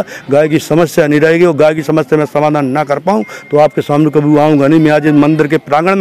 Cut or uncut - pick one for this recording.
uncut